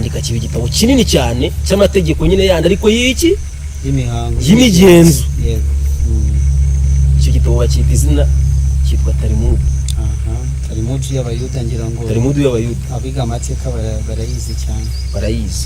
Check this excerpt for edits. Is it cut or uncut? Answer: uncut